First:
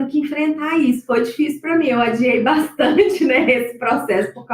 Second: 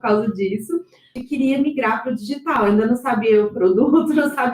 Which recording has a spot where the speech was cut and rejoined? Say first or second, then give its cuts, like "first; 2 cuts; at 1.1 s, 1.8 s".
second; 1 cut; at 1.1 s